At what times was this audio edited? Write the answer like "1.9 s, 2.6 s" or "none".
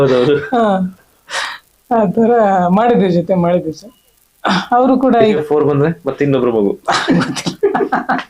5.3 s